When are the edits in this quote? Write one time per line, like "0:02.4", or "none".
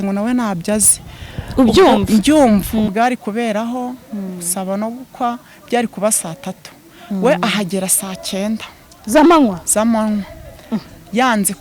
0:02.9